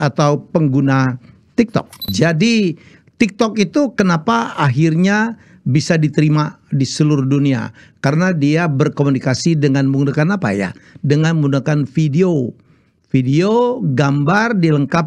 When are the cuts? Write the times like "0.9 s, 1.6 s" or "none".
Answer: 2.1 s